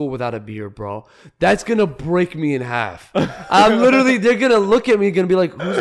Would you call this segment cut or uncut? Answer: uncut